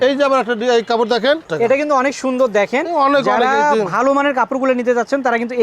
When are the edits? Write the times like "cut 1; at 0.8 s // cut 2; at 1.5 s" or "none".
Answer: cut 1; at 1.5 s